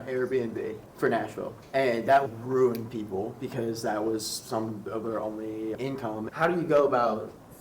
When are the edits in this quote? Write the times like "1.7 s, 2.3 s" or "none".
0.8 s, 1.6 s, 2.3 s, 5.9 s